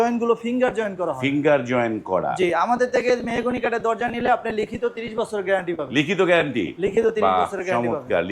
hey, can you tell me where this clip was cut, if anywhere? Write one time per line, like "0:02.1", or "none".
none